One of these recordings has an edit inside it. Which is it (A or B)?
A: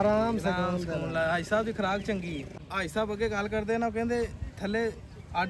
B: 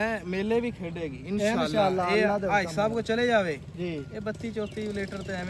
A